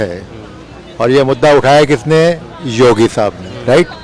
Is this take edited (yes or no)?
no